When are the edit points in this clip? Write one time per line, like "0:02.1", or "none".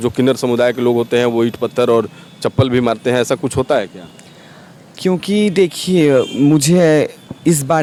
none